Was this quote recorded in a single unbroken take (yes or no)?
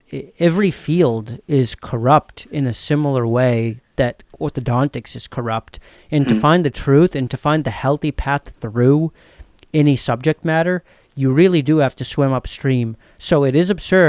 yes